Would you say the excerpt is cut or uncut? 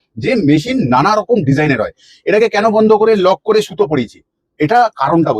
uncut